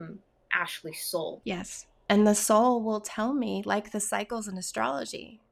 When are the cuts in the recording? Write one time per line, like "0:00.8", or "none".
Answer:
0:01.4